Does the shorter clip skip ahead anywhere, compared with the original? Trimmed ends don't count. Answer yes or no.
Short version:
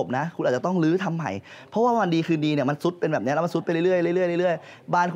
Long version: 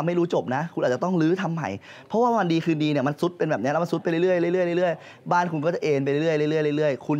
no